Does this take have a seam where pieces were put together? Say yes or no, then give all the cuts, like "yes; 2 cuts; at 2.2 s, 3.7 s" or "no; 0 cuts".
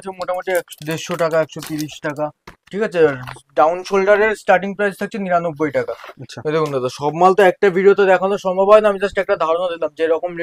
no; 0 cuts